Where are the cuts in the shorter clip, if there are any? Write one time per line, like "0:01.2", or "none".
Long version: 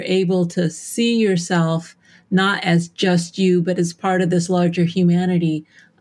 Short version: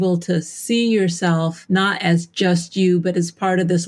0:01.6